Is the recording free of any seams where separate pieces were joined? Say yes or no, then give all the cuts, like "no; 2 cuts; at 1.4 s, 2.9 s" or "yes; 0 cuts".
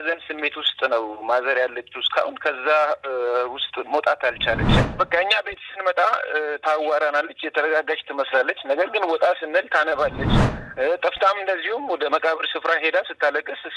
no; 1 cut; at 4.9 s